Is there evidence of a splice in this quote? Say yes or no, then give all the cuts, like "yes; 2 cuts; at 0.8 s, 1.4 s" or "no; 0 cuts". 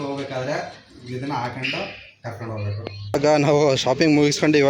yes; 1 cut; at 3.2 s